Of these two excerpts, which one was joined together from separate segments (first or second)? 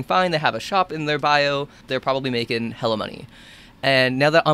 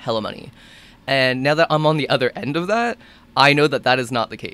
first